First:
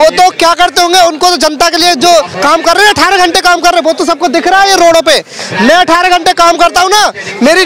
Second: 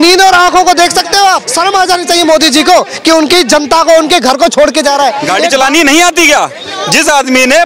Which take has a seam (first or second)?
second